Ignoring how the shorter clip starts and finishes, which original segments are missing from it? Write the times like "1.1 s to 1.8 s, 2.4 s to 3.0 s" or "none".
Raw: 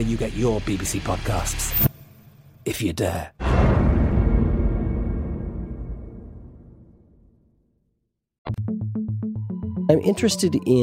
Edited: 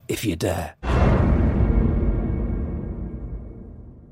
none

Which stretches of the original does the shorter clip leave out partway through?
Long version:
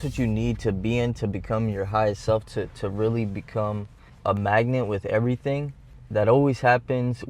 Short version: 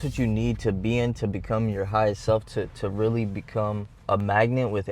3.9 s to 4.1 s

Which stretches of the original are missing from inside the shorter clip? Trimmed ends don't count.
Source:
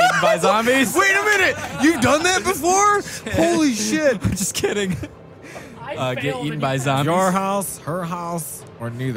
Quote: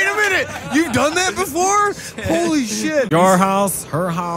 4.2 s to 7.0 s

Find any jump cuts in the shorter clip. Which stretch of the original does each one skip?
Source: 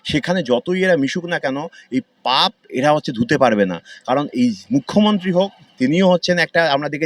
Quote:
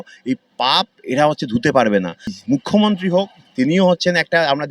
4.0 s to 4.6 s

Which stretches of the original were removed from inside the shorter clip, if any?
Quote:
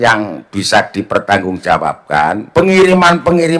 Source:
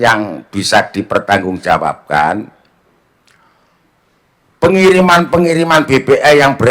2.4 s to 4.5 s

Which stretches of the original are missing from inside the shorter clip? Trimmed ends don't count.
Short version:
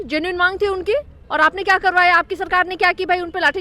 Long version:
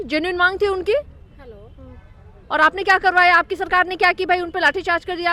1.2 s to 2.4 s

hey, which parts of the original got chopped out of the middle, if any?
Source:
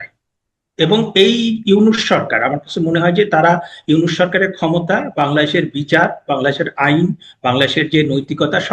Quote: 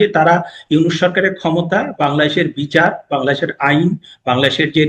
none

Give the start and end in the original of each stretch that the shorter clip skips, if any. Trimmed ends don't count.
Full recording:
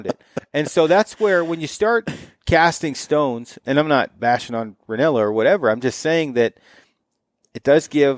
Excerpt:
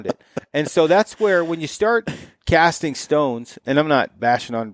none

